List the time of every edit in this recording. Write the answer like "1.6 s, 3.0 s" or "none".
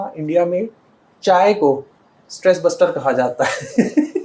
none